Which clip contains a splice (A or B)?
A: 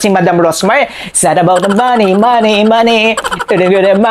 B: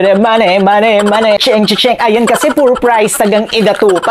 B